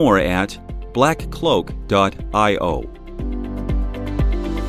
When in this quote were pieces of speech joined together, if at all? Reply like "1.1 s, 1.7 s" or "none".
3.0 s